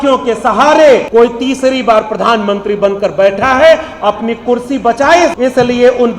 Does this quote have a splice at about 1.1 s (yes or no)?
yes